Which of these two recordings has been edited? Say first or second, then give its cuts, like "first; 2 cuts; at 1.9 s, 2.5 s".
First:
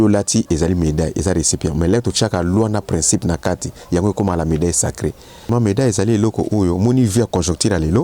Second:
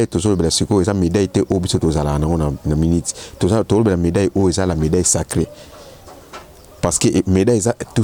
first; 1 cut; at 5.5 s